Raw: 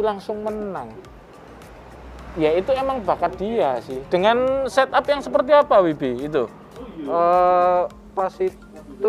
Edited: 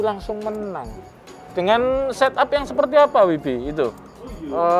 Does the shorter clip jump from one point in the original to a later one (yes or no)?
yes